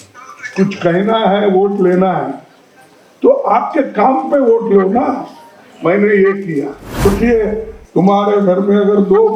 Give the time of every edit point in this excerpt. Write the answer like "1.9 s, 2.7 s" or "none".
7.0 s